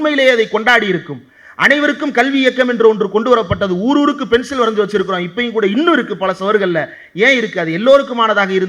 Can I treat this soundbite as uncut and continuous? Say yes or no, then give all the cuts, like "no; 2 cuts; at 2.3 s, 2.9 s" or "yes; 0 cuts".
yes; 0 cuts